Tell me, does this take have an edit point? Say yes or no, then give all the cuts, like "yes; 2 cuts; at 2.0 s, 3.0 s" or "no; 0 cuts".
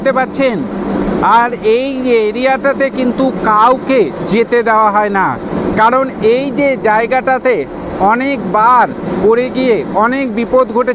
no; 0 cuts